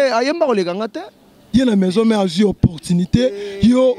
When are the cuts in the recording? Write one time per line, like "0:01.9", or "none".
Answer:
0:01.4